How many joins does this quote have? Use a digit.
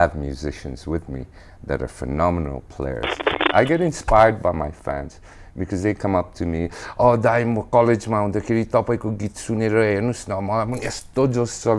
1